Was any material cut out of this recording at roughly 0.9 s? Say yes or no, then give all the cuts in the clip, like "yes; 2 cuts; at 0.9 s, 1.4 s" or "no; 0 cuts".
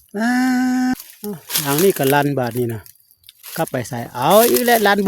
yes; 1 cut; at 0.9 s